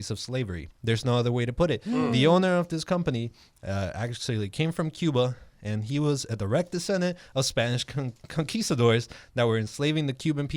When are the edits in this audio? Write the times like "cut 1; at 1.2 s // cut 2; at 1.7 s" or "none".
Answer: none